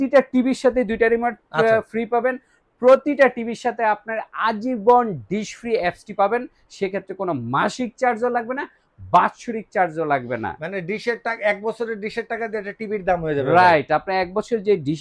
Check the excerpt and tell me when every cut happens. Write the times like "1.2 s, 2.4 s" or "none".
none